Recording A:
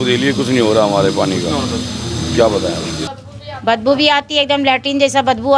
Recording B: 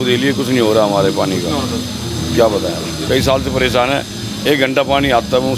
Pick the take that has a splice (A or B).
A